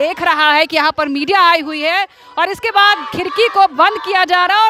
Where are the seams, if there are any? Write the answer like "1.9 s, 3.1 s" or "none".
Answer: none

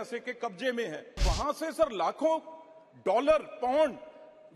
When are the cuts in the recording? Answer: 1.2 s

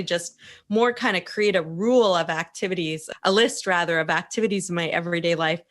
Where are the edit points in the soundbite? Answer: 3.0 s

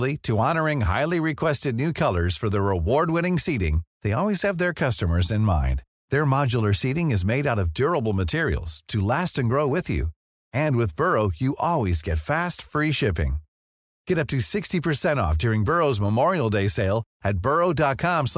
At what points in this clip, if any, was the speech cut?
none

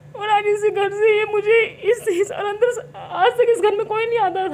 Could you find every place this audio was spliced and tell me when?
none

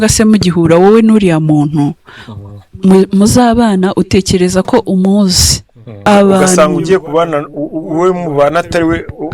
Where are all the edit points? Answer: 6.0 s

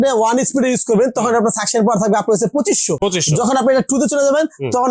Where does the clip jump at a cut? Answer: none

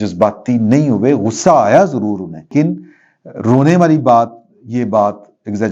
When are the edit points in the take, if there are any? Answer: 2.5 s

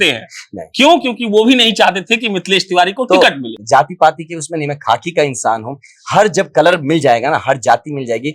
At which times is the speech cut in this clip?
3.5 s

